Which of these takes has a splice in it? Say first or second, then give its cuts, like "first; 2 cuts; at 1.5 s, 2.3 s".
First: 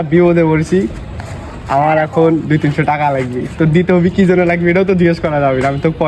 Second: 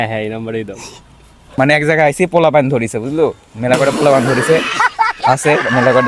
second; 1 cut; at 1.4 s